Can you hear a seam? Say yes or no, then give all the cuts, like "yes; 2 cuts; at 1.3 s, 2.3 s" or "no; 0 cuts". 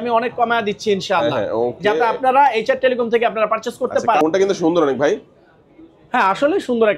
yes; 1 cut; at 4.2 s